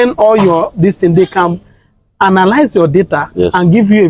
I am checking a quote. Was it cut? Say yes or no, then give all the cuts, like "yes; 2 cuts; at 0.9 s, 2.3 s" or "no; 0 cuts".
no; 0 cuts